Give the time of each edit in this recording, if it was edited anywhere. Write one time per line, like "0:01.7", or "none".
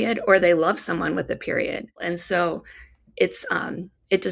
0:02.0